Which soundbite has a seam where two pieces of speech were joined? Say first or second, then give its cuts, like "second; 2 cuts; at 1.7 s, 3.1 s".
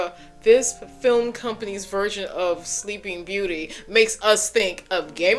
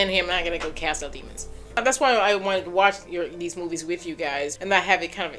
second; 2 cuts; at 1.8 s, 4.5 s